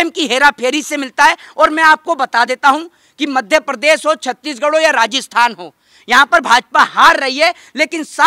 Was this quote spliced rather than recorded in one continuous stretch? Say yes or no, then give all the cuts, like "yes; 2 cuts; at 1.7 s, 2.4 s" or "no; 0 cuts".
no; 0 cuts